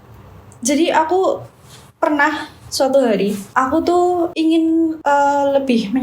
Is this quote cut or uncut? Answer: cut